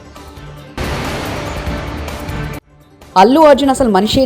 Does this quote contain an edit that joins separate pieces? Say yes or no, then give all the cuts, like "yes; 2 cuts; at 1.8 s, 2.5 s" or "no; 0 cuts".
yes; 2 cuts; at 0.7 s, 2.6 s